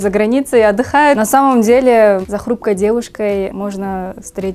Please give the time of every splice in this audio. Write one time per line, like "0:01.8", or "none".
0:01.2
0:02.3
0:03.5